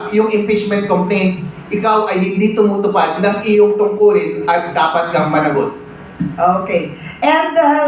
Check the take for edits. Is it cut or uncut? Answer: uncut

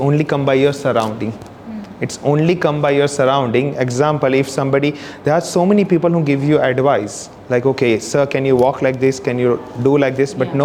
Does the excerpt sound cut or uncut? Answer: uncut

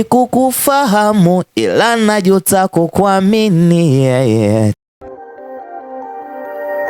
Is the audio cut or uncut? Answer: cut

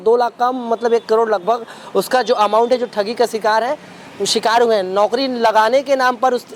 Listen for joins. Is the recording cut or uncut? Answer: uncut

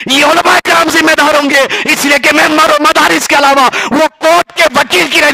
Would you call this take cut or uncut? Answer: uncut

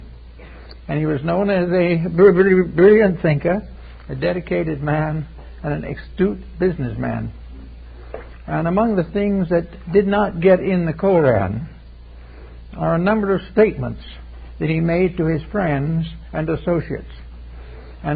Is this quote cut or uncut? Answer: uncut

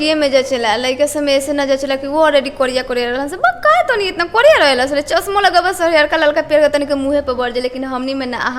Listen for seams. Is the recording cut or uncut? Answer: uncut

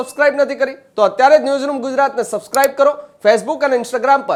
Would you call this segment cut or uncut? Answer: uncut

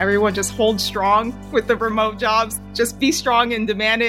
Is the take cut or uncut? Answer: cut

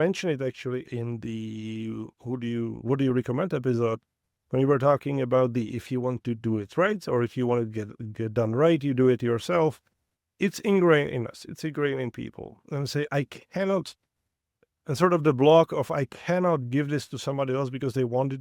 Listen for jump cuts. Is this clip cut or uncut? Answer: uncut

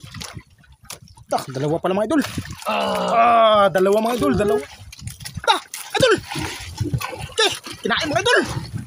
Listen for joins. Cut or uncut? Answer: cut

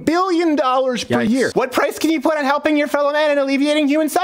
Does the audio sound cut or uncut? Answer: cut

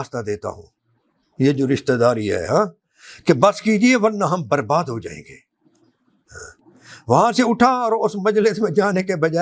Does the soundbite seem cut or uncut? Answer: uncut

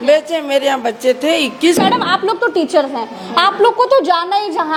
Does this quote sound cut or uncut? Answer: uncut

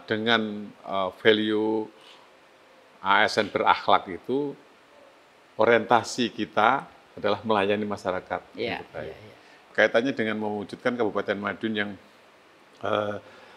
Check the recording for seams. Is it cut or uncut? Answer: cut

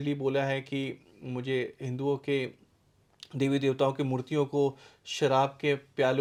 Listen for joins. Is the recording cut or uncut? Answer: uncut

